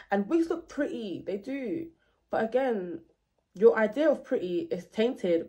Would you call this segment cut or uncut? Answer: uncut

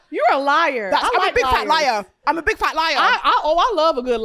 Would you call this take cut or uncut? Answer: uncut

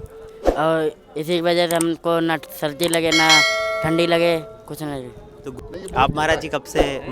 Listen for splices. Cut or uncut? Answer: cut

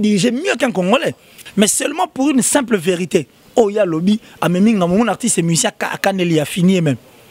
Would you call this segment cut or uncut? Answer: cut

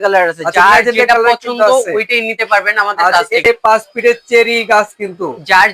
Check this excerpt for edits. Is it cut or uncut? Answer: cut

